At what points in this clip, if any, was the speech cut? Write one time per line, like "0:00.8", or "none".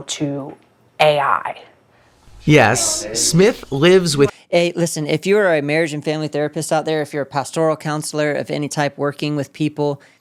none

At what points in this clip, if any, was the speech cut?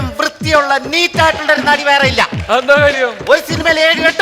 0:02.4

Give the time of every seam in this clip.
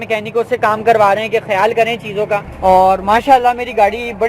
0:02.5

